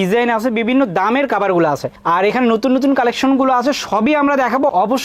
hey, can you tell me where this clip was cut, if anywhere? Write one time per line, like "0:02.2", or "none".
none